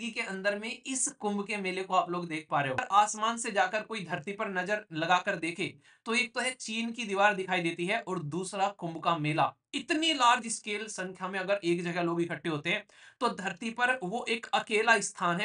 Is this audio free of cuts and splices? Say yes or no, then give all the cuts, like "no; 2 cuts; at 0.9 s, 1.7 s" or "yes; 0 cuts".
no; 1 cut; at 2.8 s